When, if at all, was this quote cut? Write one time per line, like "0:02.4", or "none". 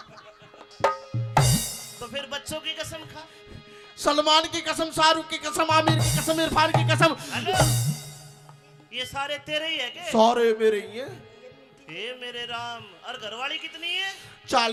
none